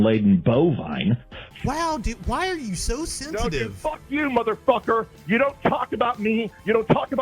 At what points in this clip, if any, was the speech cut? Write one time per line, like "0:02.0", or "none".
0:01.4